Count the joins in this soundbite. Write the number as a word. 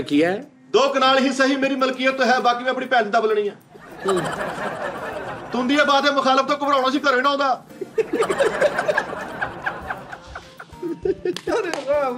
zero